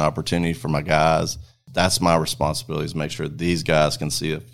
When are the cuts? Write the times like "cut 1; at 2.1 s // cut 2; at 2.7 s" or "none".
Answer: cut 1; at 1.6 s